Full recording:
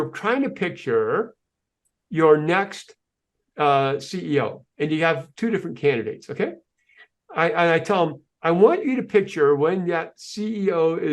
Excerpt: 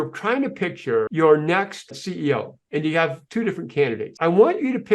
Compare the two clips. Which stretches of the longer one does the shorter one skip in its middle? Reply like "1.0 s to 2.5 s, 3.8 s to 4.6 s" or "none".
1.1 s to 2.1 s, 3.0 s to 4.1 s, 6.1 s to 8.3 s